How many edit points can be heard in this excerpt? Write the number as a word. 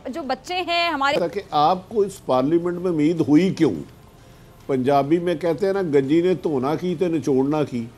one